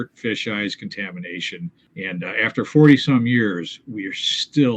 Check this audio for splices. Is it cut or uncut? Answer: cut